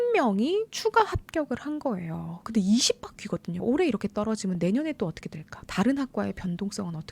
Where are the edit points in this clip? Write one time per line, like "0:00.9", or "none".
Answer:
0:03.6